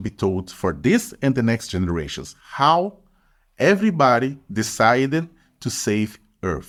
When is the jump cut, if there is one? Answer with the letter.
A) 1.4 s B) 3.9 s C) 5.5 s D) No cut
D